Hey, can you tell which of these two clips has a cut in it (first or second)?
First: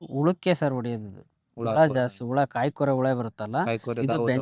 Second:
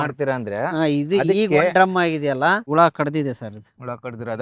second